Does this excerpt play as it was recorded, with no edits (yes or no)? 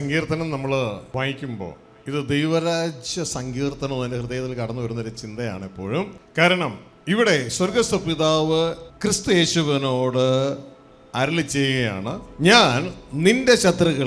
no